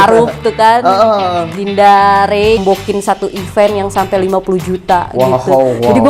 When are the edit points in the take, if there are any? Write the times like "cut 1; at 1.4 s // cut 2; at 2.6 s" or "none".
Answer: cut 1; at 2.6 s